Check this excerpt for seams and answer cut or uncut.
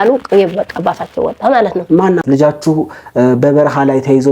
cut